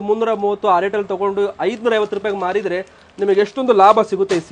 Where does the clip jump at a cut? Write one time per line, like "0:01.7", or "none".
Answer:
none